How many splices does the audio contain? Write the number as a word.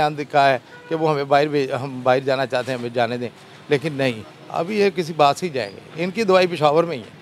zero